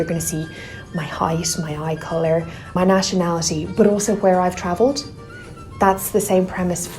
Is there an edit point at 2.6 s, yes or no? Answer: yes